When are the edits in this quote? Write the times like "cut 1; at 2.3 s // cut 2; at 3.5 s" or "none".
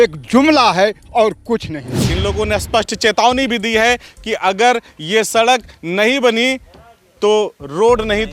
cut 1; at 2.0 s